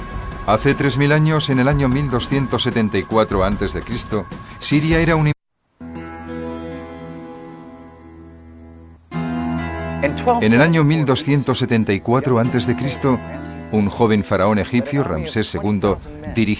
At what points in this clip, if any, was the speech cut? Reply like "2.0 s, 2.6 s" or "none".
none